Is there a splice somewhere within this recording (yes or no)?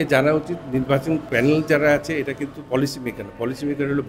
yes